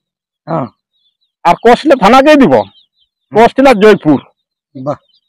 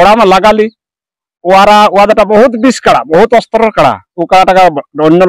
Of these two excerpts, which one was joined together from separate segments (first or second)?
second